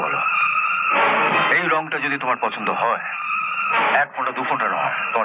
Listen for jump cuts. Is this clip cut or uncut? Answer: uncut